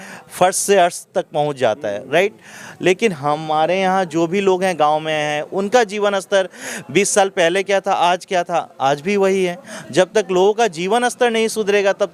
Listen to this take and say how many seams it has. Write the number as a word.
zero